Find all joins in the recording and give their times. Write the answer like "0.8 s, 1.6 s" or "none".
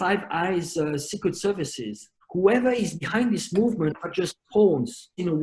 2.2 s